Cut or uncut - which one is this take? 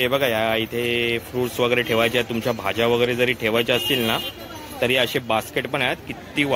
uncut